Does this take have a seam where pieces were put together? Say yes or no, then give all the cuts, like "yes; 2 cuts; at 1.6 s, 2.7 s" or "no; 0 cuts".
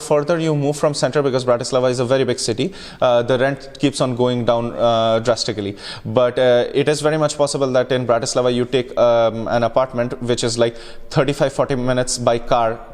no; 0 cuts